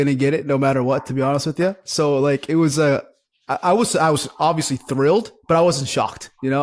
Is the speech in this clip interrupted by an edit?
no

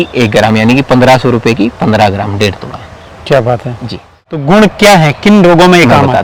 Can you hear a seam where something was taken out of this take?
no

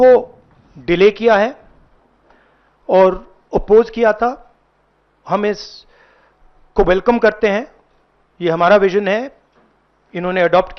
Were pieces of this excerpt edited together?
no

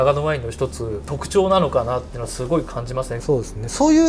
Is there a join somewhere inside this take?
yes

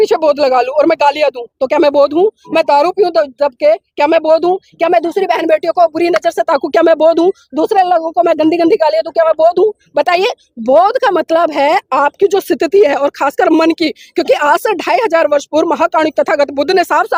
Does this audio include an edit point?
no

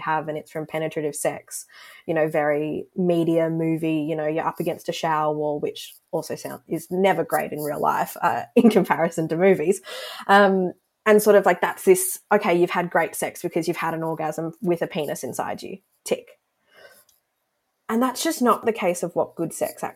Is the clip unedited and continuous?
no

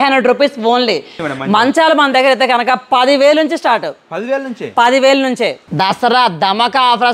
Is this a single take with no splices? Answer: no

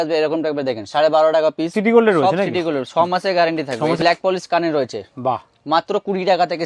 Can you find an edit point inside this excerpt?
yes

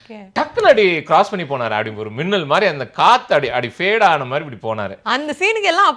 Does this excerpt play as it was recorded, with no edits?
yes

